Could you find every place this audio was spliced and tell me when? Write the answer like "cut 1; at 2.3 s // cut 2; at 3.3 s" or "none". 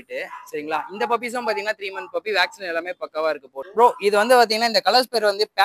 cut 1; at 3.6 s